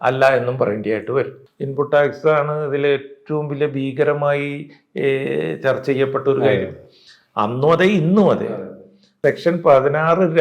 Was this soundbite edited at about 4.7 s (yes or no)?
no